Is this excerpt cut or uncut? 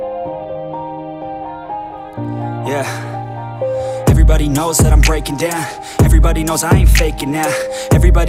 uncut